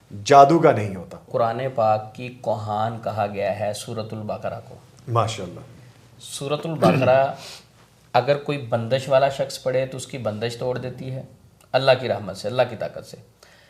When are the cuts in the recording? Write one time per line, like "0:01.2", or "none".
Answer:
0:01.2